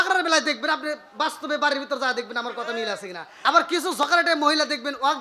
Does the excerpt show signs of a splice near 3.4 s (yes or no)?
yes